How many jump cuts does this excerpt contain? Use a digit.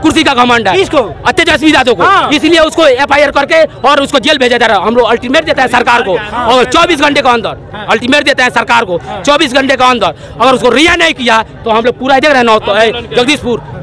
0